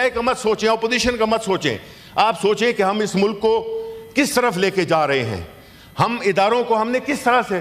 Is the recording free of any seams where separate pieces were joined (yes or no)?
yes